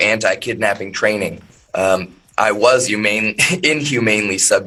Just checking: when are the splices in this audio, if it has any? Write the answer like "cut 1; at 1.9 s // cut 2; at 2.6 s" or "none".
none